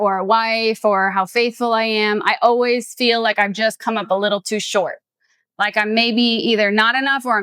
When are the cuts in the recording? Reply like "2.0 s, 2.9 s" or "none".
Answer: none